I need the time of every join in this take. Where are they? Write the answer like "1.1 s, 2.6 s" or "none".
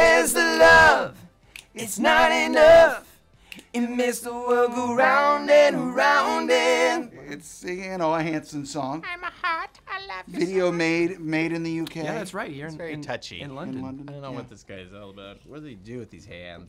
none